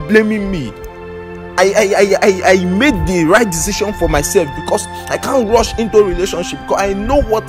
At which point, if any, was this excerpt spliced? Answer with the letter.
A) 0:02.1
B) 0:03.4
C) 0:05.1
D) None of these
D